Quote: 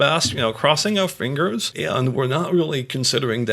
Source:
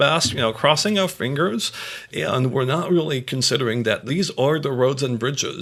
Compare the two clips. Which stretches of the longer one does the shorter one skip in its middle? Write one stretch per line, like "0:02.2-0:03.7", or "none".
0:01.7-0:02.1

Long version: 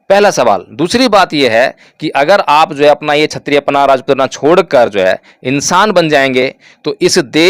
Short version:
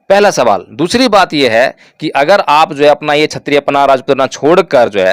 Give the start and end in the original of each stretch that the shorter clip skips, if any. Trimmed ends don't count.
none

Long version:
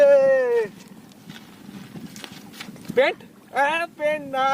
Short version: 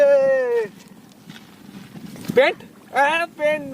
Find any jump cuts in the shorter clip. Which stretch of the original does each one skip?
0:02.1-0:02.7

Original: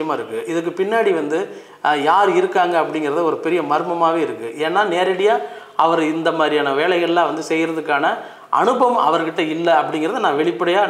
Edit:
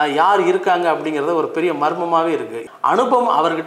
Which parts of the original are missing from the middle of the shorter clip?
0:04.5-0:08.3

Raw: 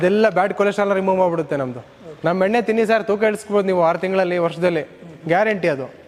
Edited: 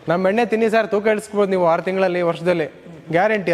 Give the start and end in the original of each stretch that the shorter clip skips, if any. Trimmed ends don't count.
none

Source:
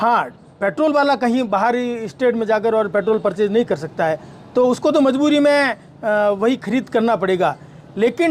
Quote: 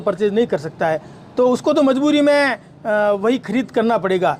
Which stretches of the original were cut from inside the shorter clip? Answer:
none

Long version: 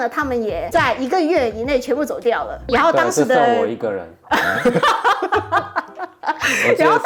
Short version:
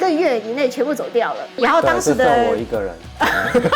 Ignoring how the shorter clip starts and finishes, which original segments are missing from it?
none

